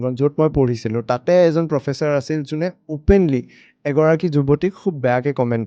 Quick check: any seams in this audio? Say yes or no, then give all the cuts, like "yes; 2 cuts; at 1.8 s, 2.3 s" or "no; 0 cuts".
no; 0 cuts